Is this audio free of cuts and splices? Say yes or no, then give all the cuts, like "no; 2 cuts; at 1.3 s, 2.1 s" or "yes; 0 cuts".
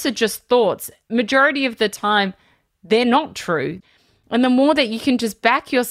no; 2 cuts; at 1.1 s, 3.8 s